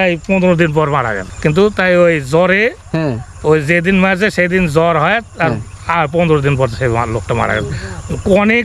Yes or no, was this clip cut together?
yes